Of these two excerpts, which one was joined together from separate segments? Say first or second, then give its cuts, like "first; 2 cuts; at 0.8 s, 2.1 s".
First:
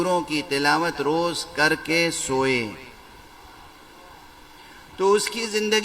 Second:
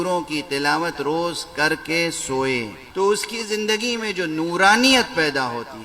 second; 1 cut; at 2.8 s